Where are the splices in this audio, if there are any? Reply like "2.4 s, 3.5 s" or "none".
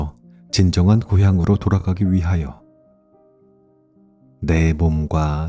2.6 s, 4.2 s